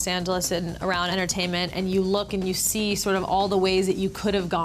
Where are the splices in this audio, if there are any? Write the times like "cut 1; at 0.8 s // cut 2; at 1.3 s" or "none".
cut 1; at 1.1 s